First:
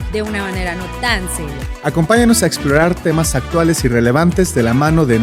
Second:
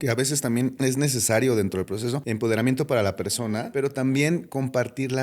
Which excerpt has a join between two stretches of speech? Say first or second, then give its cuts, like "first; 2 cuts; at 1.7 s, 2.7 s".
second; 3 cuts; at 0.8 s, 2.2 s, 3.7 s